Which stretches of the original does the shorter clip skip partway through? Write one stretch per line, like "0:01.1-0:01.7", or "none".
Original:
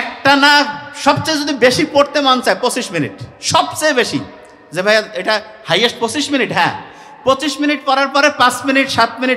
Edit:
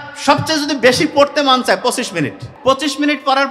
0:03.2-0:07.0